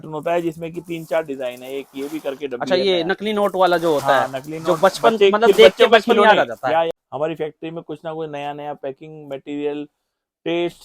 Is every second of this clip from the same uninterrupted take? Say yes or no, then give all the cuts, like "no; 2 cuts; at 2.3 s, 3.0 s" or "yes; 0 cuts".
no; 1 cut; at 6.9 s